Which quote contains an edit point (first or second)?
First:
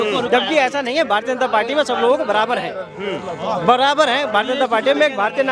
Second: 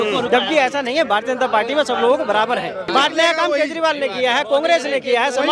second